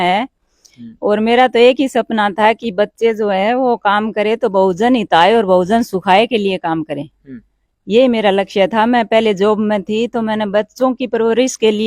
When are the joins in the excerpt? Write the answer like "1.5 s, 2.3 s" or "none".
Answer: none